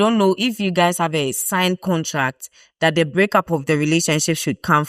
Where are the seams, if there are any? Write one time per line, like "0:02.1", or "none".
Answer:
none